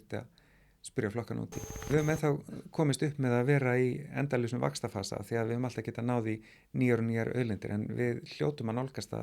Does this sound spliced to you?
yes; 1 cut; at 1.9 s

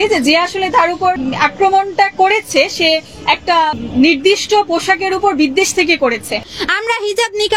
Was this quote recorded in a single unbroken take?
no; 2 cuts; at 1.2 s, 6.5 s

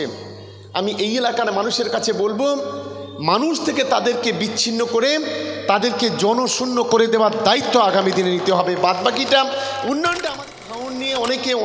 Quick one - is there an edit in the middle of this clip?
yes; 1 cut; at 10.4 s

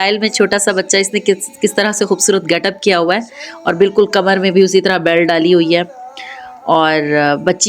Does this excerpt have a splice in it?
no; 0 cuts

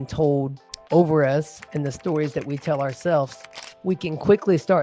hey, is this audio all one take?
yes; 0 cuts

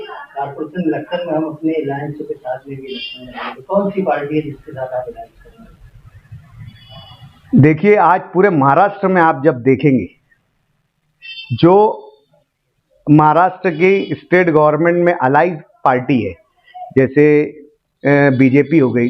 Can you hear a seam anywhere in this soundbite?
no; 0 cuts

